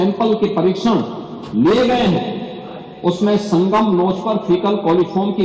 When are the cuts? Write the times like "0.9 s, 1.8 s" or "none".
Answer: none